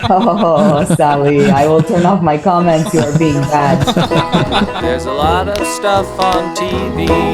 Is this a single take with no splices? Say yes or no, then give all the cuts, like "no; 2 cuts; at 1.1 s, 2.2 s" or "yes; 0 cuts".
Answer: no; 1 cut; at 5.0 s